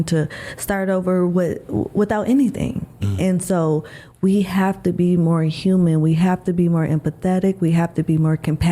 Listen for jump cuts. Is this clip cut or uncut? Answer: uncut